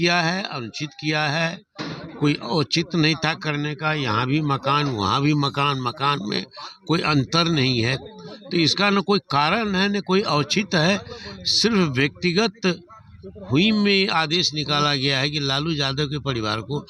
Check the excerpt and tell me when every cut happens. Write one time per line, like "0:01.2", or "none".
none